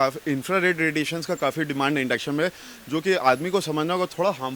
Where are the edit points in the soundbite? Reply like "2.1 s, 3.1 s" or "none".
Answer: none